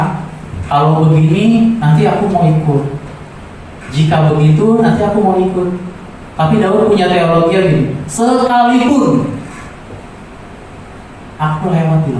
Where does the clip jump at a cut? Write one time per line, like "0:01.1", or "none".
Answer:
none